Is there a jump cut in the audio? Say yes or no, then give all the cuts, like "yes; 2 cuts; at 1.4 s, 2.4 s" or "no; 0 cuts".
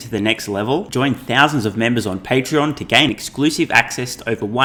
no; 0 cuts